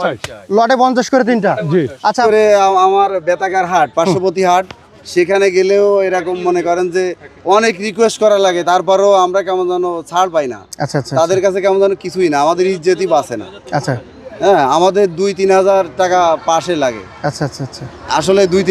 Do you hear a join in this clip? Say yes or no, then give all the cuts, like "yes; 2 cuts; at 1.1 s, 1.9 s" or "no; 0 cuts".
yes; 1 cut; at 2.2 s